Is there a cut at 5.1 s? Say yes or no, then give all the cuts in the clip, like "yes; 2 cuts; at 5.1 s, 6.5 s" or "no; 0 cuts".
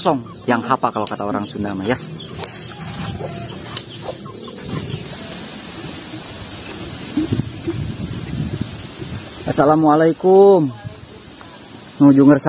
yes; 1 cut; at 5.1 s